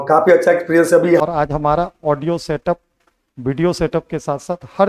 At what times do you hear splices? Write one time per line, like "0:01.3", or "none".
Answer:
0:01.2